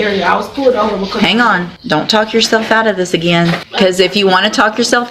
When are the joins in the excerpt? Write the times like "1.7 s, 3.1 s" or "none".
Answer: 1.7 s, 3.7 s